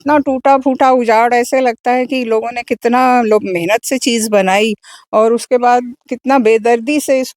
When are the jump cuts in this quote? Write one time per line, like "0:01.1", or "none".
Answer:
none

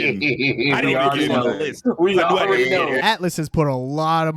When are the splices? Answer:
0:03.0

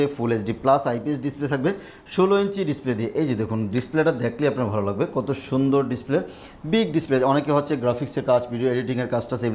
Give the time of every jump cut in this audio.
none

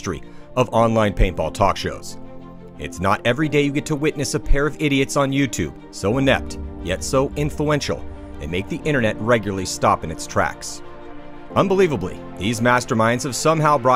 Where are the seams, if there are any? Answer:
none

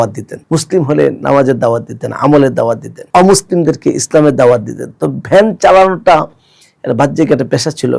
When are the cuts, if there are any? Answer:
none

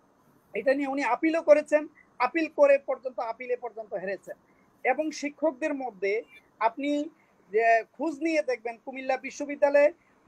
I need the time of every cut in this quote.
none

